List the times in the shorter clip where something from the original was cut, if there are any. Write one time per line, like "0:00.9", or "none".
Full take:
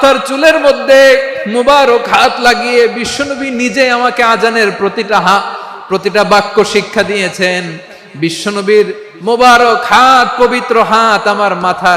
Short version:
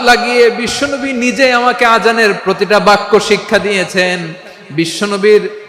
0:02.4